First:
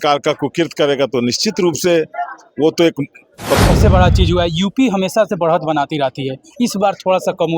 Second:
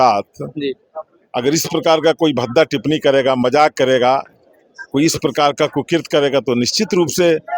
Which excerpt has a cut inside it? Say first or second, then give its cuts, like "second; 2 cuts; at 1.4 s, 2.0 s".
first; 1 cut; at 3.6 s